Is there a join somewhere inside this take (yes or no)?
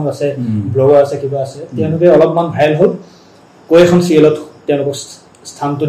no